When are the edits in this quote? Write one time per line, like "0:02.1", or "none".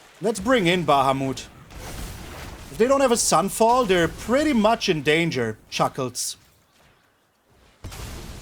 0:05.6